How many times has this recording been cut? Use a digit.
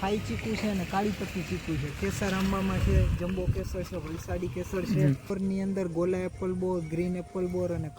1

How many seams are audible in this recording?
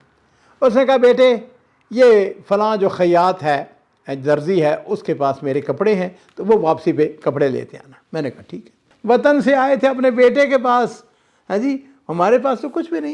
1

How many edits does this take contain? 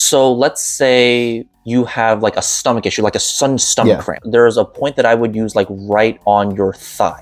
3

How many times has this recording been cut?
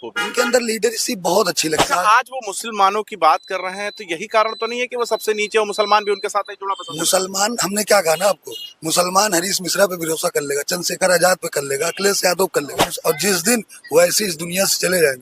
2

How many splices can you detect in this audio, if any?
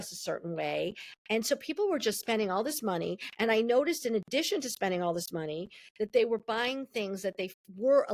0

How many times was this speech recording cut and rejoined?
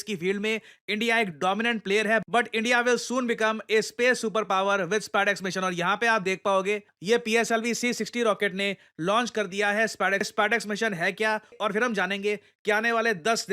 1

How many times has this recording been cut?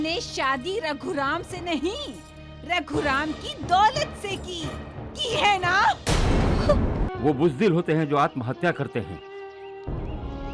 1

